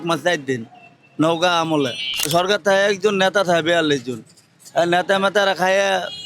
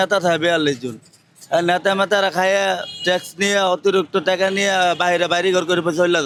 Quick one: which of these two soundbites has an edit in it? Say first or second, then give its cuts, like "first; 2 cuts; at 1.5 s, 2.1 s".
first; 1 cut; at 2.3 s